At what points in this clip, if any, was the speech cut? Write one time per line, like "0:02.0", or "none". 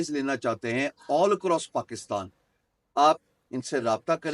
none